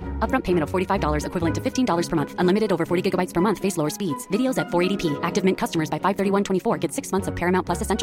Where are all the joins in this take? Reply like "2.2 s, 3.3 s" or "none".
none